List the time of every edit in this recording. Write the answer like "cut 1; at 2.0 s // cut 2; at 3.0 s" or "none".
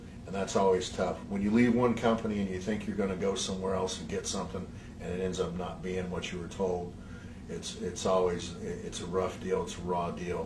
none